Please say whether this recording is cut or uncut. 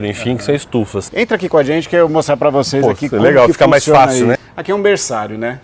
cut